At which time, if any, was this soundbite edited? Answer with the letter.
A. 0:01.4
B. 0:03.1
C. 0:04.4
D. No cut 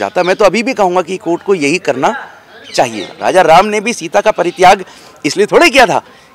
B